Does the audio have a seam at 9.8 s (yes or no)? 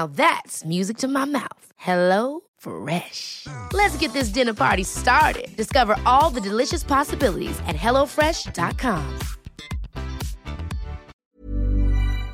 no